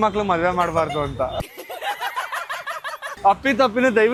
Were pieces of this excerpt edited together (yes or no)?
no